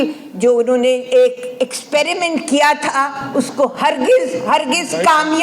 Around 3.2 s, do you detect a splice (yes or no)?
yes